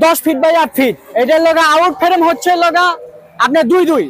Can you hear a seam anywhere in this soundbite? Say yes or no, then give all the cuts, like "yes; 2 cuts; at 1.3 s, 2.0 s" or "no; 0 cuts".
yes; 1 cut; at 1.0 s